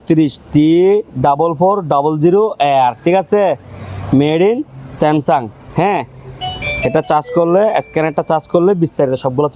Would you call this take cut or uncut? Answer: uncut